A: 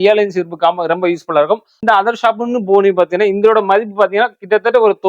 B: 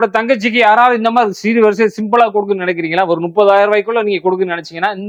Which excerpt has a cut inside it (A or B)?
A